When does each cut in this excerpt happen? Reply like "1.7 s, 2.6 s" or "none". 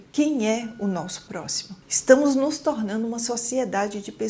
1.7 s